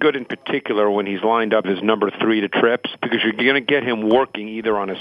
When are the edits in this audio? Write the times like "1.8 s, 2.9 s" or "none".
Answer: 1.7 s, 2.9 s